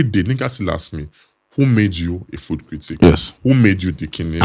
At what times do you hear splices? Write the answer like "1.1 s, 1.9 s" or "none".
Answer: none